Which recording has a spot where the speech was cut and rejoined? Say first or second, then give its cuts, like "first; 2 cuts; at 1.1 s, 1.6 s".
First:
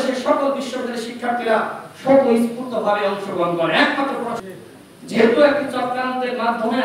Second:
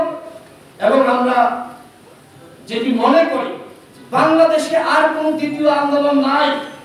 first; 1 cut; at 4.4 s